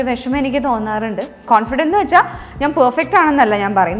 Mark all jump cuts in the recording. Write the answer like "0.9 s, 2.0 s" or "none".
1.4 s